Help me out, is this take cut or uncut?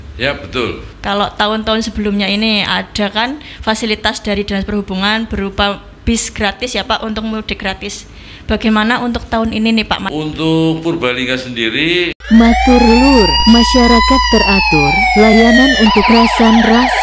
cut